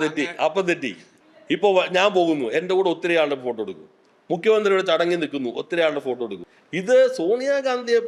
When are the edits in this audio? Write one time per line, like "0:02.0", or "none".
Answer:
none